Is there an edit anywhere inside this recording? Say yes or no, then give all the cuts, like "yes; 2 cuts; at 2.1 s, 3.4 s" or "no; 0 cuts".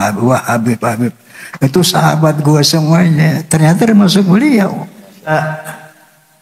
yes; 1 cut; at 5.3 s